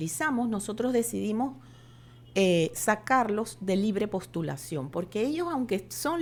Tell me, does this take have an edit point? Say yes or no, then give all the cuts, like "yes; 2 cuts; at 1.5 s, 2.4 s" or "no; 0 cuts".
no; 0 cuts